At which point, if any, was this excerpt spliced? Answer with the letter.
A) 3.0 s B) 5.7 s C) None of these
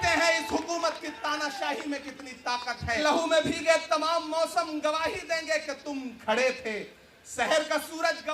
A